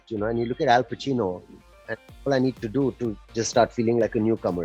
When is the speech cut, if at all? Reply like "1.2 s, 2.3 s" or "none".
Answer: none